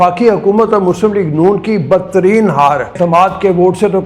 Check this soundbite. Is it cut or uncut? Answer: cut